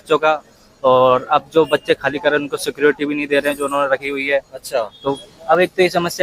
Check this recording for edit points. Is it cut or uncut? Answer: cut